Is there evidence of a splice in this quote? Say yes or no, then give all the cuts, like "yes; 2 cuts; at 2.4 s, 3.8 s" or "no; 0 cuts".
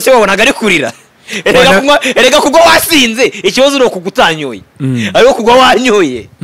no; 0 cuts